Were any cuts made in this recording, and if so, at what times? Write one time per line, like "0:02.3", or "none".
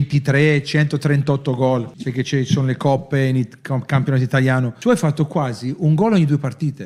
0:02.0
0:04.7

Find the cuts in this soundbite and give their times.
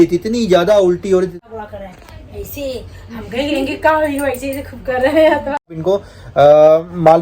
0:01.4
0:05.8

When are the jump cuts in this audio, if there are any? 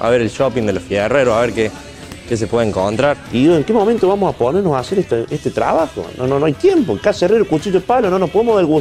0:03.2

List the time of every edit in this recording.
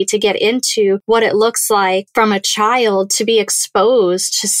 0:01.0
0:02.1

